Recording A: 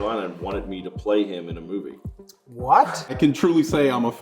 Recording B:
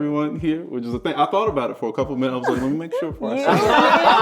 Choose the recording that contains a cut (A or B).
A